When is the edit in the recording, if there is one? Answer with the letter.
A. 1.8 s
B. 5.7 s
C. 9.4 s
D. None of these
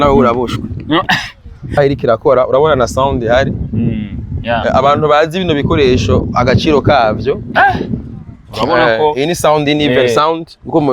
A